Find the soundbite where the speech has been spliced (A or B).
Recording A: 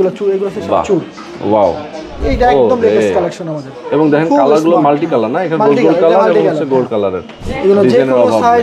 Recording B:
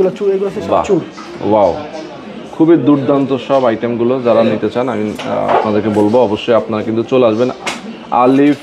A